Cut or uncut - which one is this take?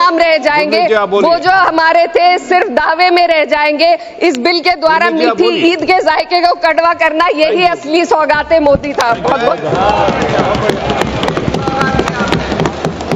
uncut